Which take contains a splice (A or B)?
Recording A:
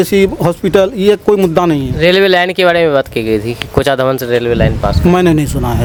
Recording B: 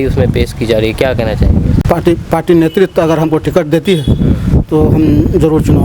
B